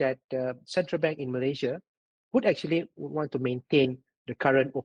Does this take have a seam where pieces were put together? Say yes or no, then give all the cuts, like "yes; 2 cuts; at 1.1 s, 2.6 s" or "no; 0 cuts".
no; 0 cuts